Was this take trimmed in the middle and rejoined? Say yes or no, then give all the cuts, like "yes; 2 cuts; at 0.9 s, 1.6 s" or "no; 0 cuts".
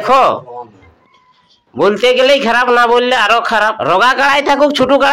yes; 1 cut; at 3.8 s